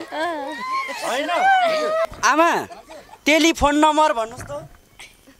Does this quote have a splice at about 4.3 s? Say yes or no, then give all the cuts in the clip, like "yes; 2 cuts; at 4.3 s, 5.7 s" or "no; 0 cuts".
no; 1 cut; at 2.1 s